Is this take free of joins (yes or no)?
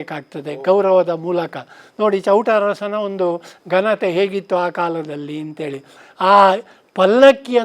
yes